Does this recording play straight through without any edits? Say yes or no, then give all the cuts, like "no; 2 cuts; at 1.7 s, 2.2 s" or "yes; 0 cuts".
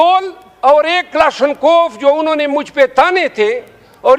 yes; 0 cuts